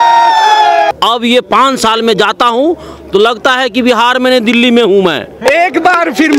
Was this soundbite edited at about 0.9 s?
yes; 2 cuts; at 0.9 s, 5.4 s

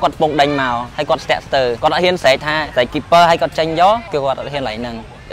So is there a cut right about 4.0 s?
yes; 3 cuts; at 1.8 s, 2.6 s, 4.0 s

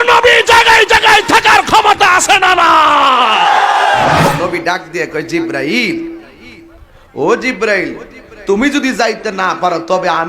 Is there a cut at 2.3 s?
no; 1 cut; at 4.2 s

